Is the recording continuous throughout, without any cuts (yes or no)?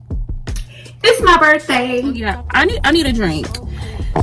no